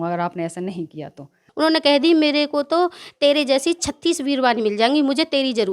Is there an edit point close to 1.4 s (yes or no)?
yes